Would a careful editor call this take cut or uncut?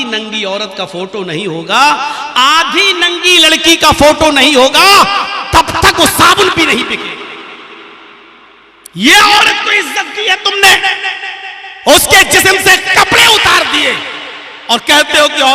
uncut